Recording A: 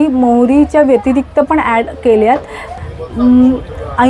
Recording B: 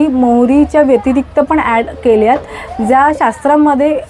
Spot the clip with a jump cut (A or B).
A